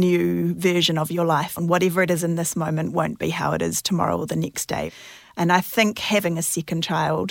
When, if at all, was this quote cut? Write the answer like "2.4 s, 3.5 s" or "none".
1.5 s, 4.9 s, 6.2 s